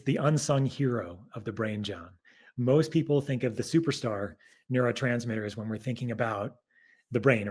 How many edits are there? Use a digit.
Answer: 0